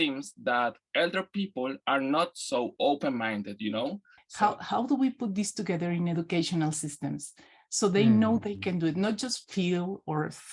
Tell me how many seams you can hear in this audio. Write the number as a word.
one